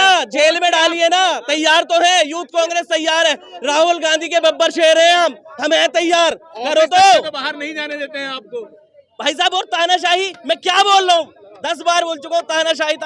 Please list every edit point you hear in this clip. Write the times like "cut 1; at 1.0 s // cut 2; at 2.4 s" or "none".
none